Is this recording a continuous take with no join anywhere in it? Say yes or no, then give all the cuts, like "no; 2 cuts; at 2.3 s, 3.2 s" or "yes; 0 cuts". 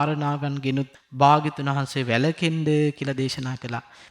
no; 1 cut; at 1.0 s